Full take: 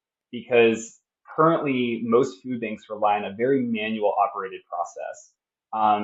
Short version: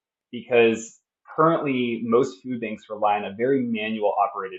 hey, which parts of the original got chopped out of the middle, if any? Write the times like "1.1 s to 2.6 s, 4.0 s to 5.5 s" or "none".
none